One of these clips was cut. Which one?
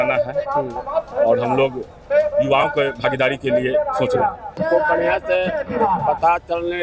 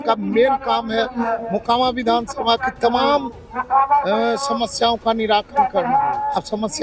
first; 1 cut; at 4.5 s

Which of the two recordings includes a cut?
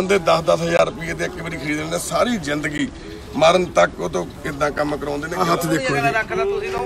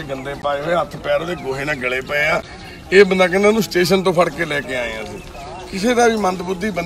first; 1 cut; at 5.3 s

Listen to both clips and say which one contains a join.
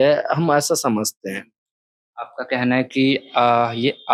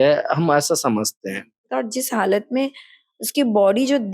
second; 1 cut; at 1.6 s

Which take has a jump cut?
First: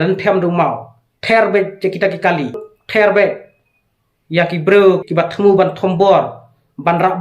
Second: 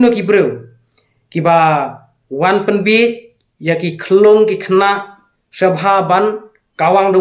first; 2 cuts; at 2.7 s, 5.0 s

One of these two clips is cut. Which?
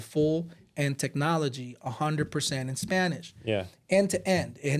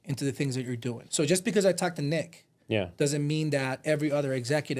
second; 1 cut; at 1.0 s

